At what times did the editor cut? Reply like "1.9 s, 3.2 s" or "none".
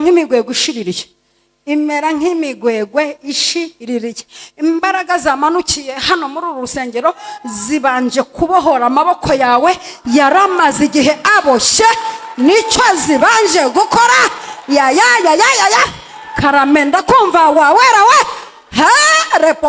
none